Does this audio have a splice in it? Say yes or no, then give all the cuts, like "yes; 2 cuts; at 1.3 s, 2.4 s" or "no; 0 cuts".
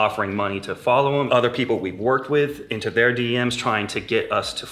yes; 1 cut; at 1.3 s